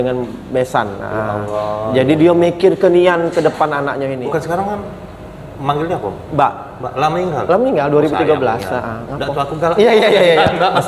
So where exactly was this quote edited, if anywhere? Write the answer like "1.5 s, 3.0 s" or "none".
4.2 s

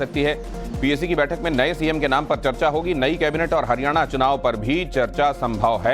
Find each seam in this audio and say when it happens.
1.4 s

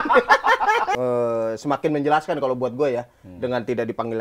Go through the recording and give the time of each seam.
0.9 s

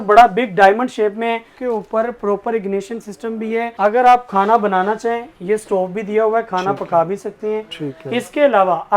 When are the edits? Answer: 1.5 s, 3.7 s

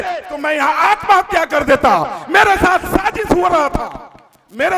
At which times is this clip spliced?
none

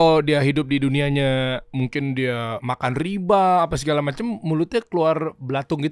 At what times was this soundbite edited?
1.7 s, 2.6 s

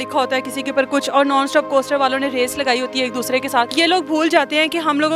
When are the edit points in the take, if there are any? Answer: 3.7 s

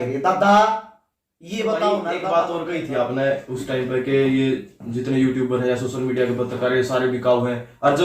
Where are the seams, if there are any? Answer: 2.2 s

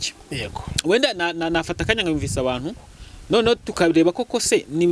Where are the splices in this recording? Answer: none

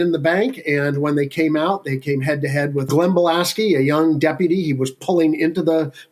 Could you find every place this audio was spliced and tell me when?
2.9 s

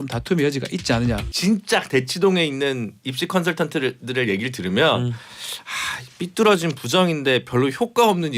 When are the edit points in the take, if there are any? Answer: 1.3 s

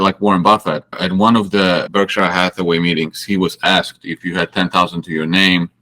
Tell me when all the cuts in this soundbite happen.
1.0 s, 1.9 s

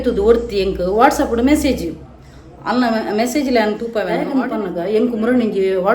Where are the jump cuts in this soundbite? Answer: 4.2 s

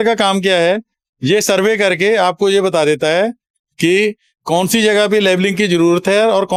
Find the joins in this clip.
none

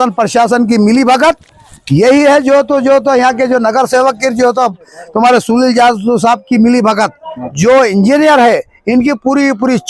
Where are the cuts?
7.4 s

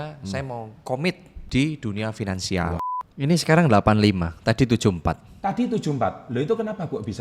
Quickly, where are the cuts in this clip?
1.3 s, 2.9 s

